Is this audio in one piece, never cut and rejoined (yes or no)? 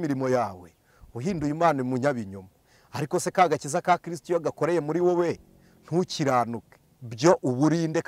yes